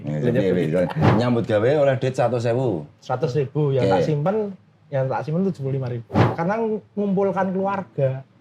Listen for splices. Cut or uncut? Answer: cut